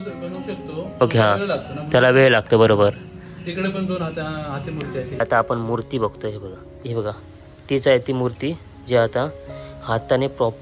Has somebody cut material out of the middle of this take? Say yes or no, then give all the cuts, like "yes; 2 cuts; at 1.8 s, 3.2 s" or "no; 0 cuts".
yes; 1 cut; at 5.2 s